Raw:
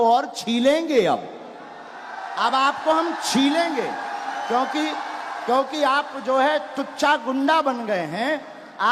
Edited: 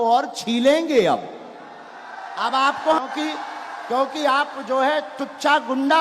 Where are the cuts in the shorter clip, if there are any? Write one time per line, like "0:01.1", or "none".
0:03.0

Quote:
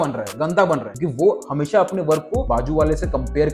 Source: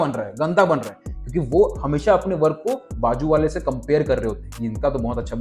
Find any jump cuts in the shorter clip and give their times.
0:01.0
0:02.4

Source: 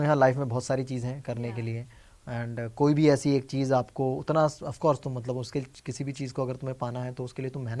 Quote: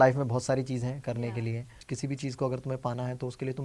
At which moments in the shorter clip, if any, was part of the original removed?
0:01.8

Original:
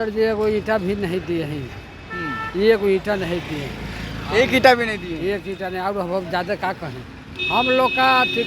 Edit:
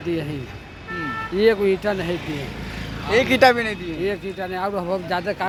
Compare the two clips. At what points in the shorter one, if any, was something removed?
none

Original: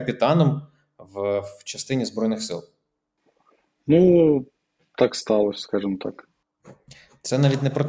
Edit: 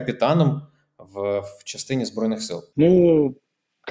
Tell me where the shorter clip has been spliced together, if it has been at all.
0:02.7

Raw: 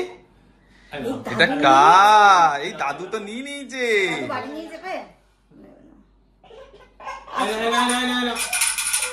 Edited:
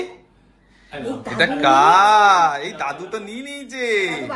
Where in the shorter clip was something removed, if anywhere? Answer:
none

